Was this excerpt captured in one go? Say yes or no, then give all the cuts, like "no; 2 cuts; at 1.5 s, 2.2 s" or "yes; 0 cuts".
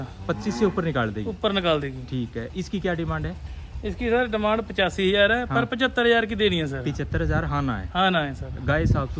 yes; 0 cuts